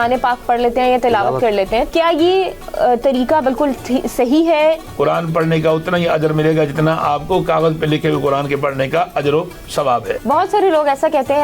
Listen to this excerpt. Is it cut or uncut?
cut